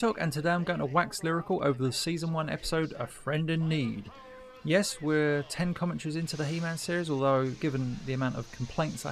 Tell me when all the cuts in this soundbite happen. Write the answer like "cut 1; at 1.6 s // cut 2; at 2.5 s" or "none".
none